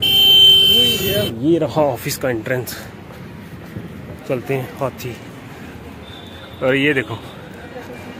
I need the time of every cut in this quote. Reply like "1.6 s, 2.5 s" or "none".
1.3 s